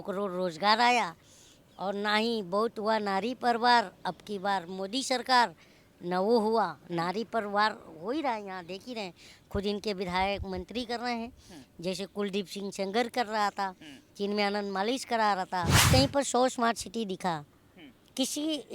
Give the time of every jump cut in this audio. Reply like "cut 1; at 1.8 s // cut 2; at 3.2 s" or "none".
cut 1; at 15.8 s